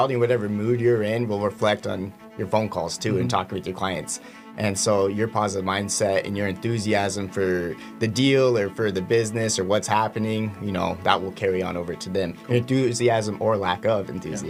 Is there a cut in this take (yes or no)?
no